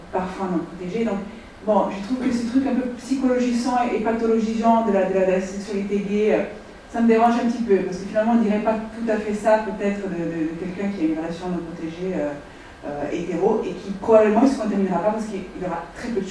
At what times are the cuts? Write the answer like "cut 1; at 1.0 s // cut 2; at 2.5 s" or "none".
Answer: cut 1; at 11.0 s